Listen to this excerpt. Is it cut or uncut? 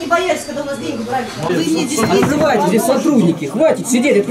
cut